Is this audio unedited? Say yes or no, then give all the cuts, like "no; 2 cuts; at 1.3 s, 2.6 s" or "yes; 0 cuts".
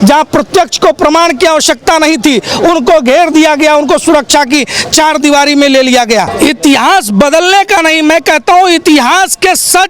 no; 1 cut; at 6.3 s